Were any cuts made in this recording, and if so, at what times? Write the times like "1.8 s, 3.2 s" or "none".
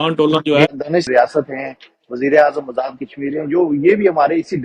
1.1 s